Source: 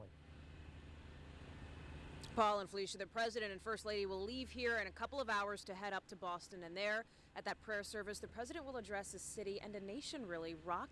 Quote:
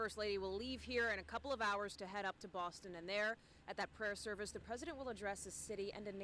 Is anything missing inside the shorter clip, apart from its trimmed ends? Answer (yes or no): no